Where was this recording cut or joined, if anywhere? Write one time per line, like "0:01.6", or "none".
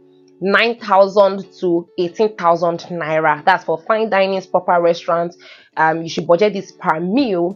none